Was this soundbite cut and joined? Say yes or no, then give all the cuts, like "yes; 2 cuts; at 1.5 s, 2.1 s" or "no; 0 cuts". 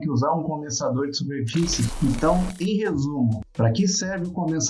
yes; 1 cut; at 1.9 s